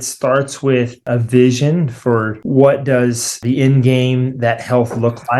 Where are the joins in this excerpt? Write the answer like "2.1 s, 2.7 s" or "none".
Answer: 1.0 s, 2.4 s, 3.4 s